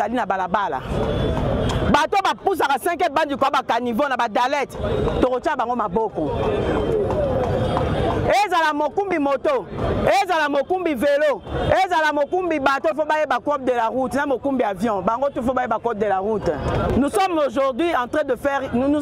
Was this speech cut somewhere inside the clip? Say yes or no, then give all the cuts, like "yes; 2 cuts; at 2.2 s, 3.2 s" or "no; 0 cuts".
no; 0 cuts